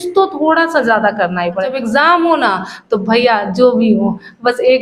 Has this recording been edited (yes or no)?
yes